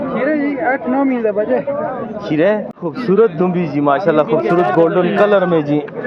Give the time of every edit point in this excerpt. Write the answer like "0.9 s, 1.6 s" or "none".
2.7 s